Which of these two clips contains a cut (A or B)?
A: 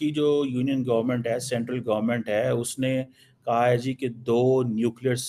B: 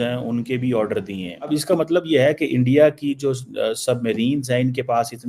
B